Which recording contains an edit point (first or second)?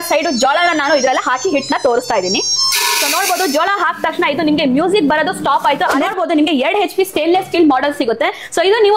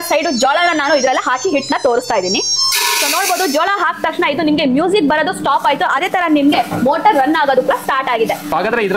first